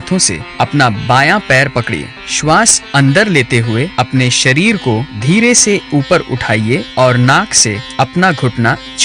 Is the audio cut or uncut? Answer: cut